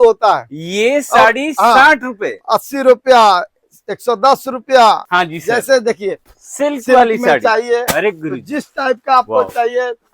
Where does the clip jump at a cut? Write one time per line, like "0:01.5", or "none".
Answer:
0:05.1